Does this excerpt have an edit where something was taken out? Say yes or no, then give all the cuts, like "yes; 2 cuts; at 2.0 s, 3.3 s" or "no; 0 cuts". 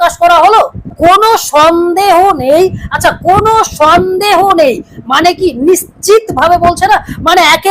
yes; 1 cut; at 0.9 s